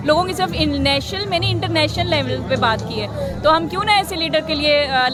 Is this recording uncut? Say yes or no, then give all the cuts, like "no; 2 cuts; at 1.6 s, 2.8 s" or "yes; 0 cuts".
yes; 0 cuts